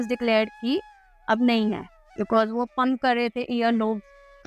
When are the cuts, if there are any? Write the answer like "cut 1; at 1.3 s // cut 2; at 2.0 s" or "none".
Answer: none